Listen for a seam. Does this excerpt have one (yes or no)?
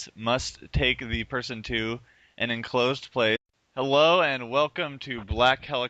no